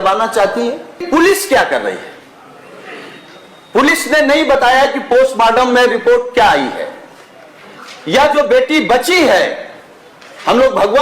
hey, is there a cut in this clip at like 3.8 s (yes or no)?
no